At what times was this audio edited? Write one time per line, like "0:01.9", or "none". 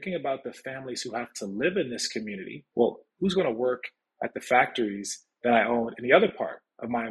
0:02.6